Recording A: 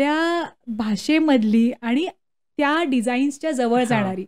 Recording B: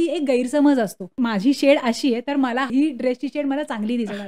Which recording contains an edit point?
B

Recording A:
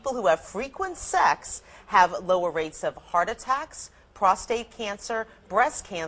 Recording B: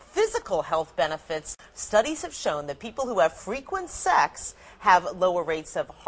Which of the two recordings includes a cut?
B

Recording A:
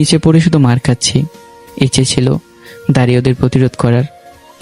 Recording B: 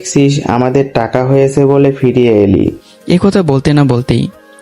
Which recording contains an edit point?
B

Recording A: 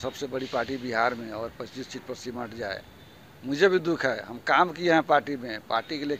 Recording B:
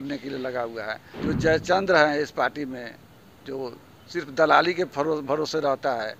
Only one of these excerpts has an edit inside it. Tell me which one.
B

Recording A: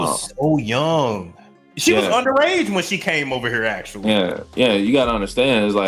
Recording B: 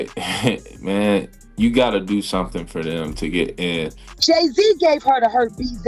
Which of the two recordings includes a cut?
B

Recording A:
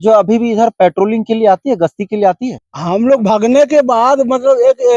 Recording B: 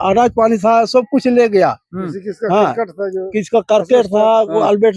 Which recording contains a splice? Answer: A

